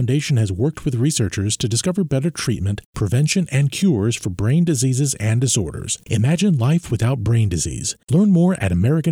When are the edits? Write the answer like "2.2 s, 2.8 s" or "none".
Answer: none